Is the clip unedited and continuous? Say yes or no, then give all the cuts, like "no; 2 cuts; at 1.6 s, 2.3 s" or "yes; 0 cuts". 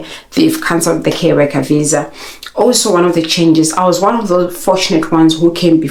yes; 0 cuts